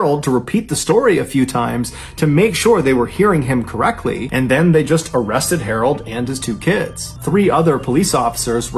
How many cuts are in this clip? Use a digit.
0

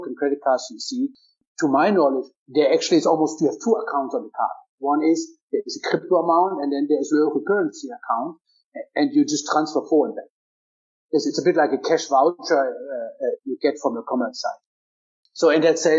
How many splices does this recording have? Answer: 2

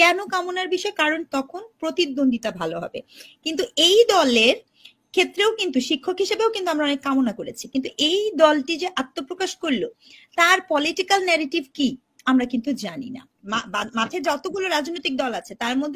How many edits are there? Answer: 1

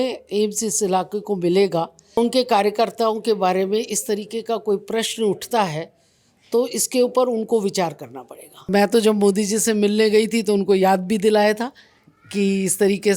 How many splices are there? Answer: 2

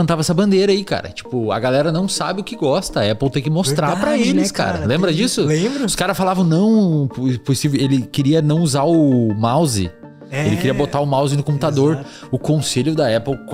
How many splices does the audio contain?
0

